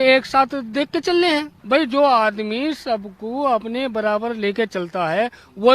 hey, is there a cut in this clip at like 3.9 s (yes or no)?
no